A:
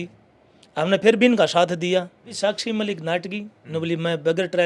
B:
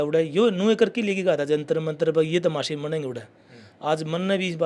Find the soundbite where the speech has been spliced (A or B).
A